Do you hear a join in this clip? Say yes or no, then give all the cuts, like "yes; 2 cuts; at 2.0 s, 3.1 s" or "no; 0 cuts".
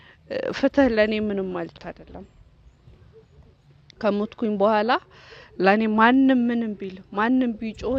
no; 0 cuts